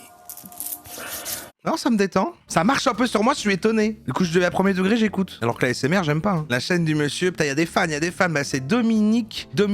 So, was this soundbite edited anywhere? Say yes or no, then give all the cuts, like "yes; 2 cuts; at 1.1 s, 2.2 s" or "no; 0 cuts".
yes; 5 cuts; at 1.6 s, 2.4 s, 4.0 s, 5.3 s, 6.4 s